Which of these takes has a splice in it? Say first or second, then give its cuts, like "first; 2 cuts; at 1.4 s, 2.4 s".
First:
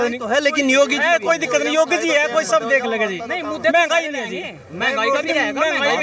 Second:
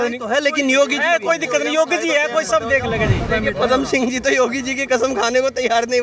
second; 1 cut; at 3.3 s